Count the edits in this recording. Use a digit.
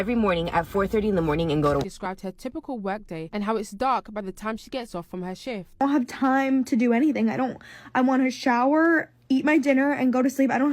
1